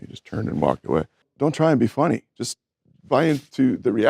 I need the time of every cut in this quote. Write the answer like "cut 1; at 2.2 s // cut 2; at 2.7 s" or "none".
cut 1; at 1.2 s